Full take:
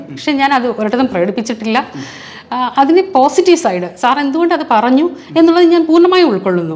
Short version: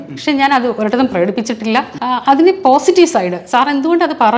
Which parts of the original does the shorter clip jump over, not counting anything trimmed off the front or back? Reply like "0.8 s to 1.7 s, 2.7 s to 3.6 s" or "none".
1.9 s to 2.4 s